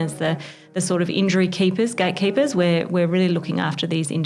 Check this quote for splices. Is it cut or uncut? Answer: uncut